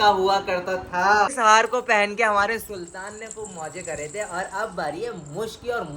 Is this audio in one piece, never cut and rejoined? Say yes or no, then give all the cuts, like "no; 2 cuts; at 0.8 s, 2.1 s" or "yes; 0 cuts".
no; 1 cut; at 1.4 s